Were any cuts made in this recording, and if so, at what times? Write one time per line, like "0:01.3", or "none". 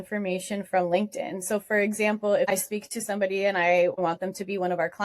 0:02.5
0:04.0